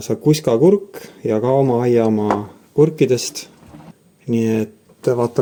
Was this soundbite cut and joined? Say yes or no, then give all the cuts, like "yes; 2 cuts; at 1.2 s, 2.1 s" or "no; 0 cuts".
no; 0 cuts